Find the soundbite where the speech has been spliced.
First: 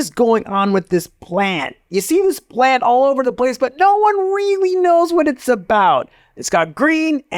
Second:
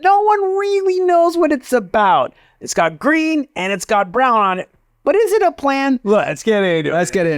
second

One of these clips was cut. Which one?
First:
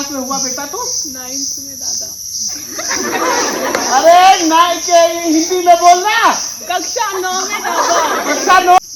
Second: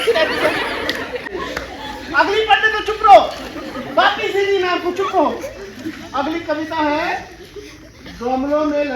second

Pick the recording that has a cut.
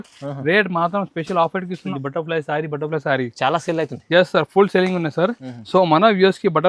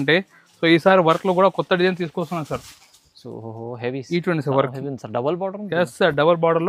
first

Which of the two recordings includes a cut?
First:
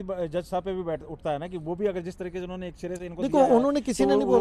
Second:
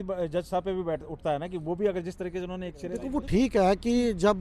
second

